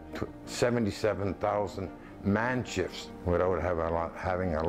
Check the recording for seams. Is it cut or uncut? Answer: cut